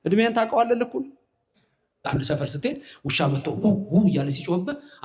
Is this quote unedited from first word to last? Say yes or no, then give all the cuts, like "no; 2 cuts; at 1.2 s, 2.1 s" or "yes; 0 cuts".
no; 1 cut; at 2.0 s